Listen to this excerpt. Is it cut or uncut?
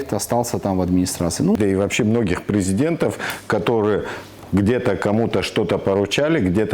cut